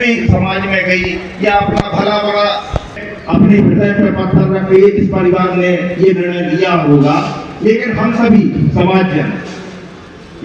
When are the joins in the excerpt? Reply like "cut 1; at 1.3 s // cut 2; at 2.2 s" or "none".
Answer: none